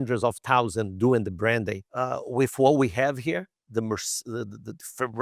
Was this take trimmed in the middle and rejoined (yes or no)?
yes